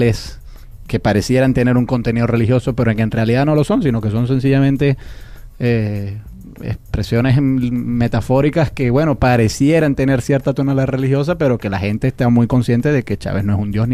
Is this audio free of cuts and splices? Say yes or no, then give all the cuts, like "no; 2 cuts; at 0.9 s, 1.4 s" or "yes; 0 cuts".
yes; 0 cuts